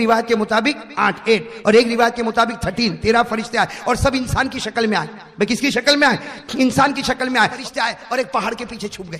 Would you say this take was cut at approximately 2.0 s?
no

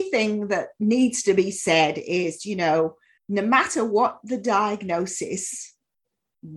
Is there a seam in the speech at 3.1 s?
yes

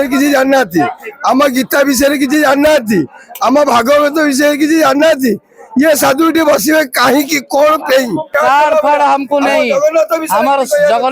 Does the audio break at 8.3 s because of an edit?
yes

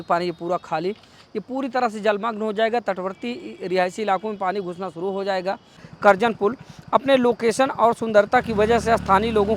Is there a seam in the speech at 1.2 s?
no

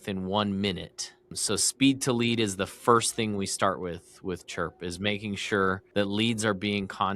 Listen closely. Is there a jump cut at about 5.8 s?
yes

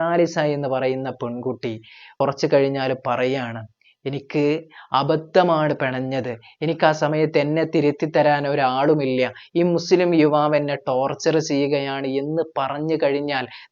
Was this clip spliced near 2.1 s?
yes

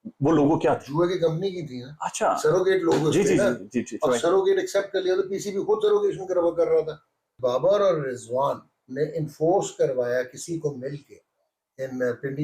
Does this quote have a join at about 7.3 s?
yes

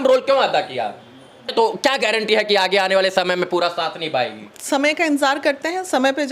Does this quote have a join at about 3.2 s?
no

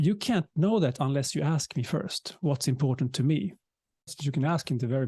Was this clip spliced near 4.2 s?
yes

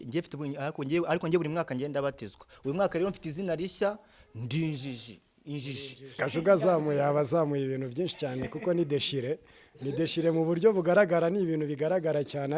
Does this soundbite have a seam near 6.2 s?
yes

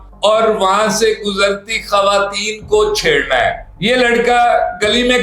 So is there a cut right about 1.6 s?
no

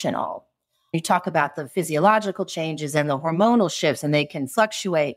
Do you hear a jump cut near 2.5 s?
no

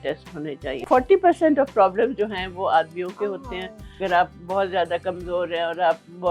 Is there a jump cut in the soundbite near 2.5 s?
no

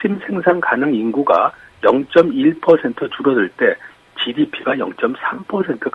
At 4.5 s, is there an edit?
yes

